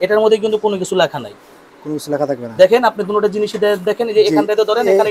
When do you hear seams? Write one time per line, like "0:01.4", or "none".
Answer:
none